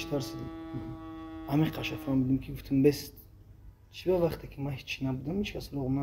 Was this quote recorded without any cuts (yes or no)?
yes